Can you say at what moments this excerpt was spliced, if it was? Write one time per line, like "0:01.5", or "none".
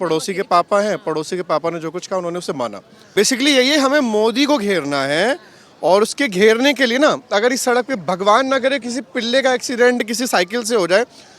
0:03.1